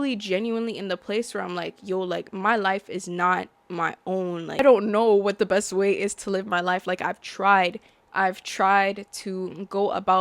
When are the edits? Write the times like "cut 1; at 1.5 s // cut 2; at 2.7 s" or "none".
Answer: cut 1; at 4.6 s